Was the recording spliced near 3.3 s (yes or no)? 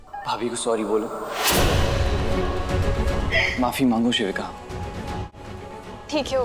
yes